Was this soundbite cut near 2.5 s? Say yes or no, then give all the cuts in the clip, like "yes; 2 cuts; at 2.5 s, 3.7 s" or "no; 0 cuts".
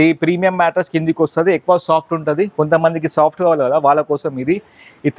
no; 0 cuts